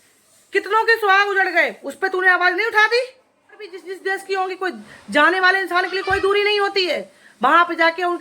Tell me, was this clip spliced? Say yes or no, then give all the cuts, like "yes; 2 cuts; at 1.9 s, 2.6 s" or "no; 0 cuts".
yes; 1 cut; at 3.9 s